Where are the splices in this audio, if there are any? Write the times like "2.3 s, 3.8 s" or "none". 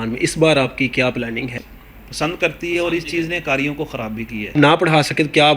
1.5 s, 4.5 s